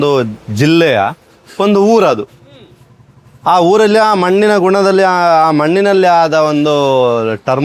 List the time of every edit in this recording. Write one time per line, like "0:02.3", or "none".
none